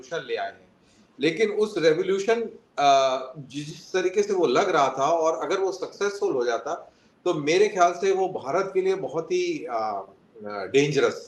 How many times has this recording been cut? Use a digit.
0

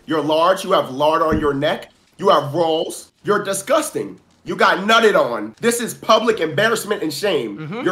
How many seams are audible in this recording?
2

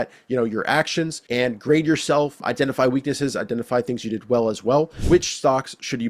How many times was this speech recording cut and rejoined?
3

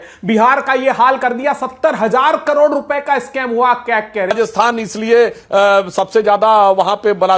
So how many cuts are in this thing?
1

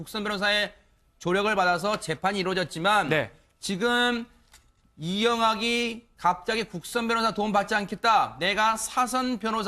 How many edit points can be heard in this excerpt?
1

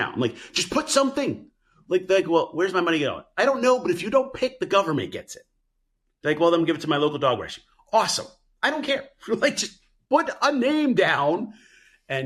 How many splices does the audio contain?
0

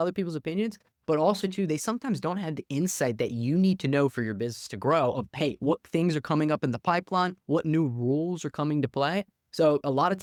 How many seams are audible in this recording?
0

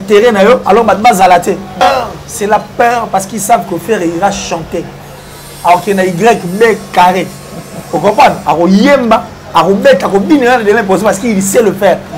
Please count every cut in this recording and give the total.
1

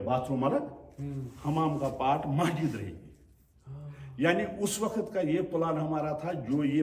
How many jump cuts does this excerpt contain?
0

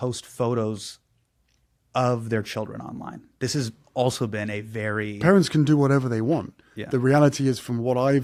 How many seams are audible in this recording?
0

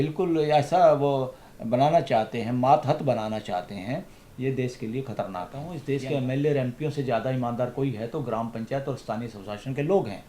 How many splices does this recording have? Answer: 1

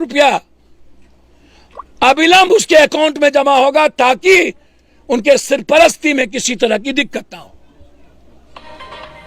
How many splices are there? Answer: 0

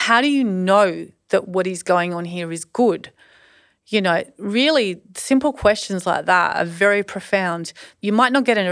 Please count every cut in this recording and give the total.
1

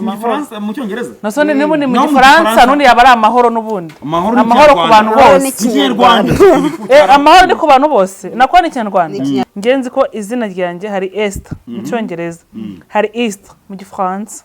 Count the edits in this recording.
1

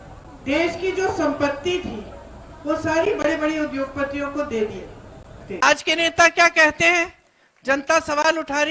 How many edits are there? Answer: 1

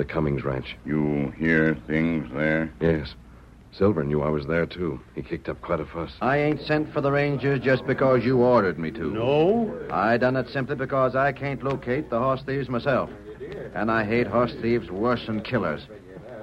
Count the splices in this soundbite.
1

